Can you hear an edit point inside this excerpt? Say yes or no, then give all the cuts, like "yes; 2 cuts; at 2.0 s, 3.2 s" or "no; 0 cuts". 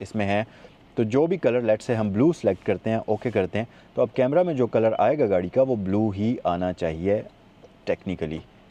no; 0 cuts